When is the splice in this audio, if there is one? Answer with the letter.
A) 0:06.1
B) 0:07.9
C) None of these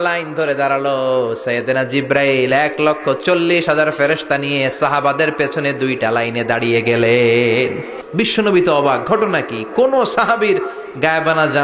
B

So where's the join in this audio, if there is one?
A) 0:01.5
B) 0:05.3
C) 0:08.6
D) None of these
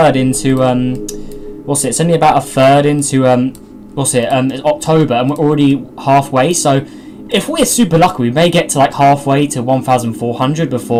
D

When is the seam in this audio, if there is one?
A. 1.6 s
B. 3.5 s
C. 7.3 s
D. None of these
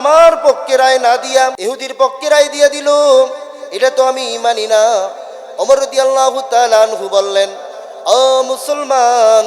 A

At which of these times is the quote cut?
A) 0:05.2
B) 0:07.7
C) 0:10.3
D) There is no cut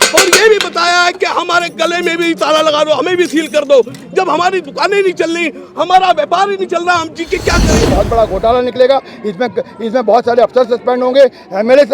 B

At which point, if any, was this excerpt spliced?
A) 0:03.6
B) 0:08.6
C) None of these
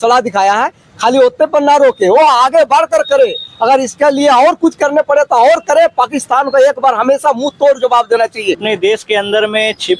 B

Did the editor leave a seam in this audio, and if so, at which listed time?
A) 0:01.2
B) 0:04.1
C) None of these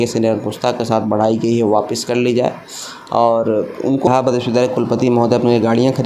B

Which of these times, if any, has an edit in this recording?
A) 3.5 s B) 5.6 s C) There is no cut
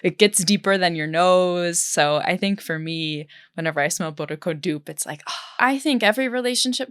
B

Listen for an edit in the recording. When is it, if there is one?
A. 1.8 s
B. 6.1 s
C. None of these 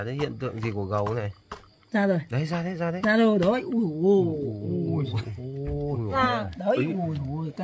B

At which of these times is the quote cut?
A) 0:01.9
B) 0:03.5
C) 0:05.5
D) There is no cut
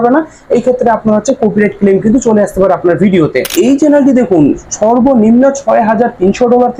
B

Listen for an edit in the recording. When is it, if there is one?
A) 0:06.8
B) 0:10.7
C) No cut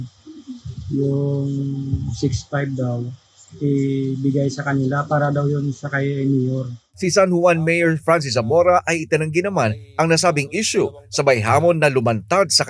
C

